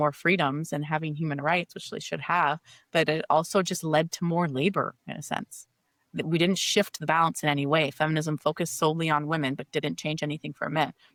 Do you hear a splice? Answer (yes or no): no